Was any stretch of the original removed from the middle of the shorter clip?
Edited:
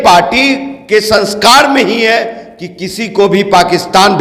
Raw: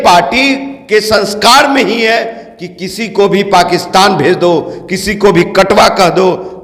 no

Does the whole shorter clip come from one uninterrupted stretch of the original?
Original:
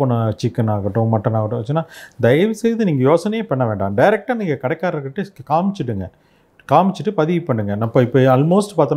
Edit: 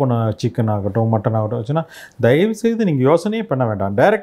yes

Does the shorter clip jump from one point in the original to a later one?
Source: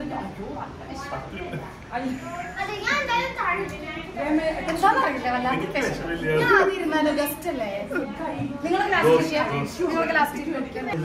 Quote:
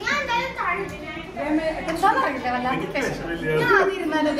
no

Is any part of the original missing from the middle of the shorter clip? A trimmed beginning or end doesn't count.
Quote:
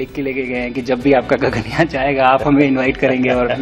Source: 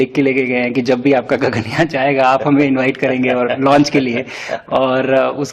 no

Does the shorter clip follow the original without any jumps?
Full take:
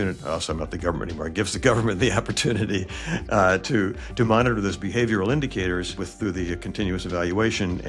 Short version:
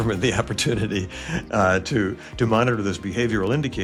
yes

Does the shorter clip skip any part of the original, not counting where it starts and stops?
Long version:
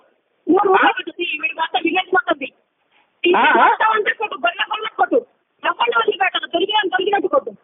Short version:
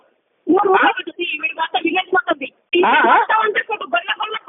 yes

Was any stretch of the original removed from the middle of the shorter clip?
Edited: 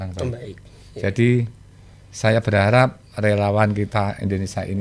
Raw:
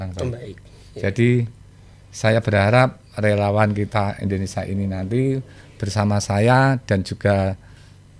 no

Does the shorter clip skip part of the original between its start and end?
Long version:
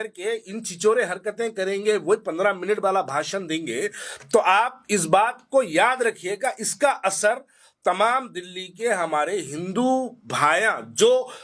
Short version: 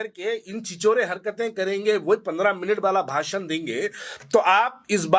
no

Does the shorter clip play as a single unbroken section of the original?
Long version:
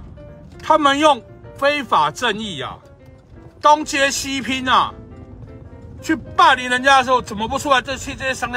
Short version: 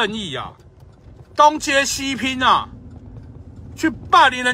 yes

